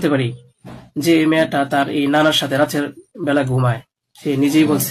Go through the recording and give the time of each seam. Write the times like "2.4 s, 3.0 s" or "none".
none